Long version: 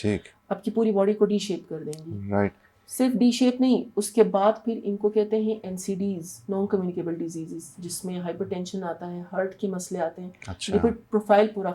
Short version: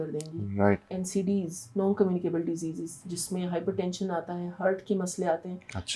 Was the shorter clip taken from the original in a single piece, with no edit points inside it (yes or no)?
no